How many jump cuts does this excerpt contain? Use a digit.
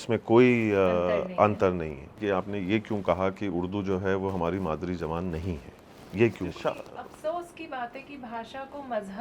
2